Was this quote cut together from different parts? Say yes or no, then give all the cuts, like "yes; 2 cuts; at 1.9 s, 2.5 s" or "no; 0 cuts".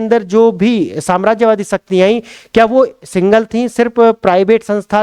no; 0 cuts